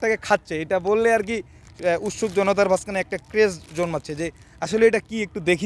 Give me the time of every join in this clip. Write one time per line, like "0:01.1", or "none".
none